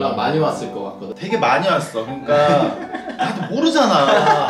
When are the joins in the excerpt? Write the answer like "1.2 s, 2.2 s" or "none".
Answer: 1.1 s

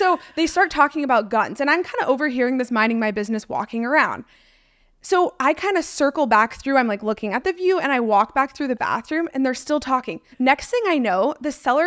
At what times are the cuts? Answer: 10.3 s

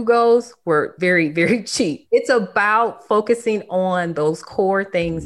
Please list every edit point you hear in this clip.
0.9 s, 2.0 s

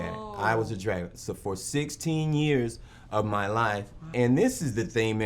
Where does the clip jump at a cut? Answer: 4.1 s

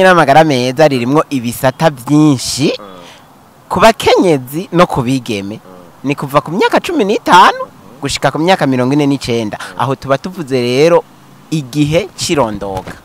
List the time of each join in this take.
none

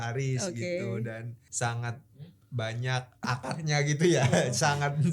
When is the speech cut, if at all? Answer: 1.4 s, 3.2 s

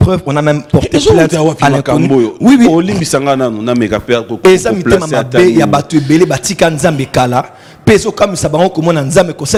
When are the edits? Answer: none

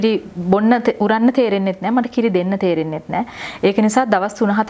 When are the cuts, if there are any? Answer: none

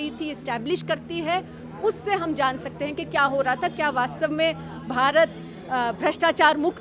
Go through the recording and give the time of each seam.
none

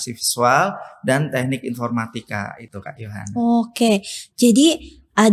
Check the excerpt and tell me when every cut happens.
none

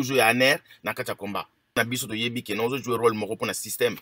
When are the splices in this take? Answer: 1.8 s

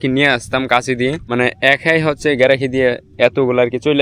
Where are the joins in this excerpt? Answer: 1.2 s

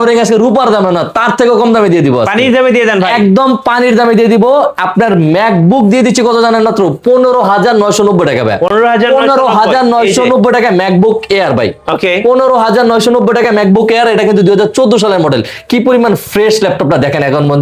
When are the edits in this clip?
none

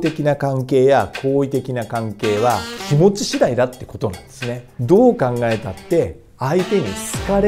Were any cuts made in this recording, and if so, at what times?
2.8 s, 4.7 s

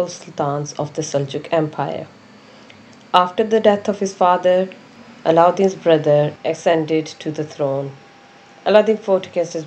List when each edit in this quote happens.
none

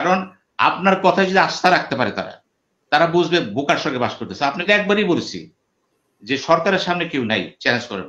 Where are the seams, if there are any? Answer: 4.7 s

